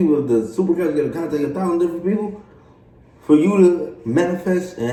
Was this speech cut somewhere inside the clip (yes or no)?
no